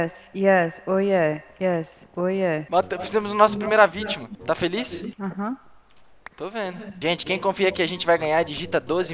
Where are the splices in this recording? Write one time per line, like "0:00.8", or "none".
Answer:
0:02.7
0:06.9